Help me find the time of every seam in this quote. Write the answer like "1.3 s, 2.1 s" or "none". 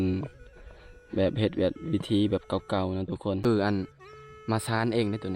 3.4 s